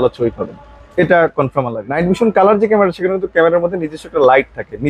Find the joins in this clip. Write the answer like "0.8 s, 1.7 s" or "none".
1.8 s